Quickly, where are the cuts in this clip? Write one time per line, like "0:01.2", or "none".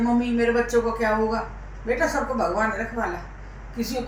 none